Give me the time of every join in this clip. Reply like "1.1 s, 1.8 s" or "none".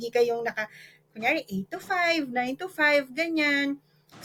none